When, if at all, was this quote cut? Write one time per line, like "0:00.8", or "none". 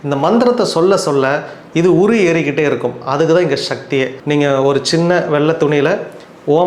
0:04.2